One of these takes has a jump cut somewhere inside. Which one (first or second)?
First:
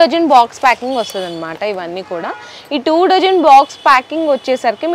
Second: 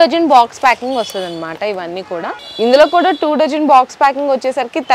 second